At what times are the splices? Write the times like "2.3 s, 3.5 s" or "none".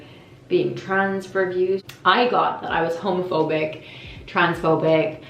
1.8 s